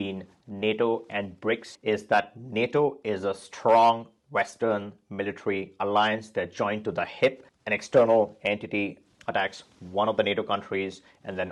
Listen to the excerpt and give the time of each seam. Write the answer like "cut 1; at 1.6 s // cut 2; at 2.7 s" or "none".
none